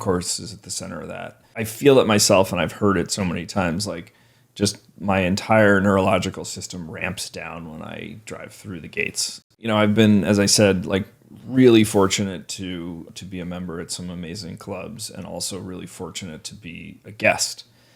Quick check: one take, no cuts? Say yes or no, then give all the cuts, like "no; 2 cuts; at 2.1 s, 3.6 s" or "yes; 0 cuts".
no; 3 cuts; at 1.7 s, 9.5 s, 13.1 s